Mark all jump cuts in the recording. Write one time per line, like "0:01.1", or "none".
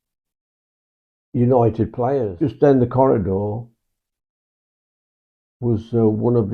0:02.3

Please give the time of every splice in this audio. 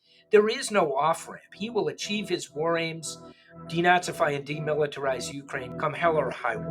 0:05.7

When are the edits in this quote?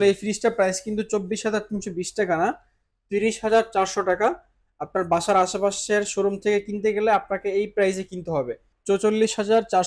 0:08.7

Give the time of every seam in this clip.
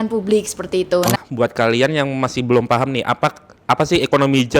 0:01.1

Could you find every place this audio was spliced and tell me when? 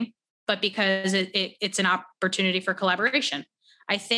none

